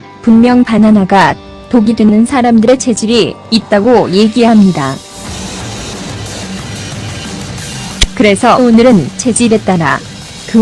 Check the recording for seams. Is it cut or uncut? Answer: cut